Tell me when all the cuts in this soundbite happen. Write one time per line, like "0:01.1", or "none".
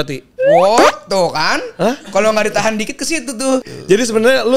0:03.6

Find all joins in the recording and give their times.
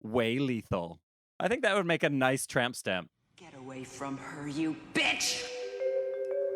0:01.0
0:03.1

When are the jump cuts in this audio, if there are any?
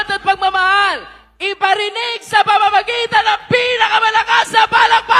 none

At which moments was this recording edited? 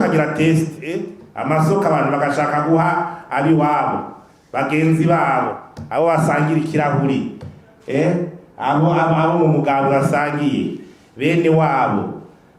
none

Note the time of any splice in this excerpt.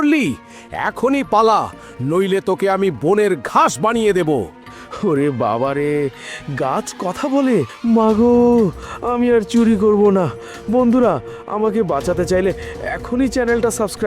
0:07.7

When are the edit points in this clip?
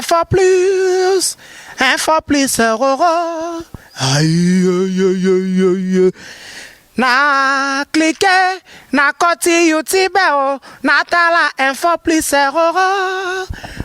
none

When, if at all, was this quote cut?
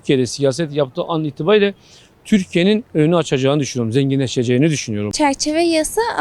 0:05.1

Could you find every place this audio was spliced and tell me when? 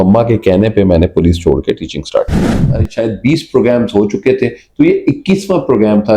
0:02.6

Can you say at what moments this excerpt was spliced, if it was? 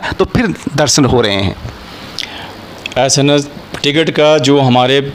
none

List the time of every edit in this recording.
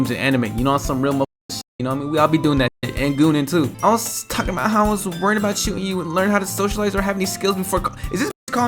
0:03.7

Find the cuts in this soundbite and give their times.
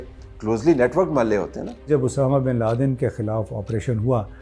0:01.9

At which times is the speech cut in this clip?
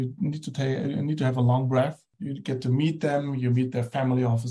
0:02.1

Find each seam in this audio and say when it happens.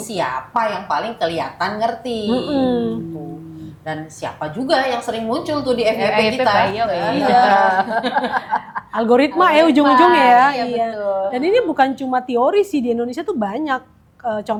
none

